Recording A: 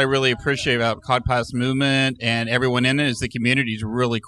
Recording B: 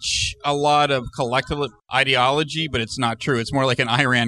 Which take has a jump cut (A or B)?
B